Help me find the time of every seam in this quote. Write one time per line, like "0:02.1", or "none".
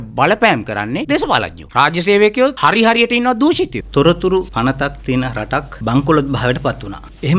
0:01.6
0:03.8